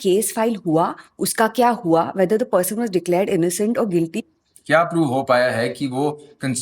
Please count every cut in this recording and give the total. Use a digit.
1